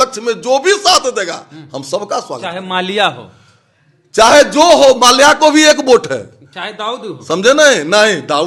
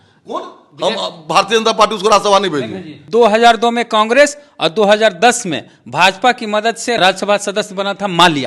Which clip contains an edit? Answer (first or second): second